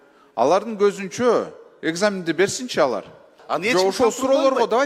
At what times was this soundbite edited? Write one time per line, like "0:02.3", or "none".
0:03.4